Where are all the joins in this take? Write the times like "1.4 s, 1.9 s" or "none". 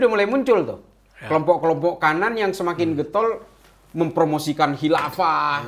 none